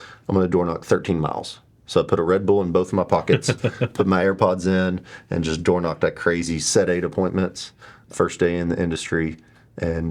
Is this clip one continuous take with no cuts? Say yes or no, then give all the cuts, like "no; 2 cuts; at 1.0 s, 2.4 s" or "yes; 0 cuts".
yes; 0 cuts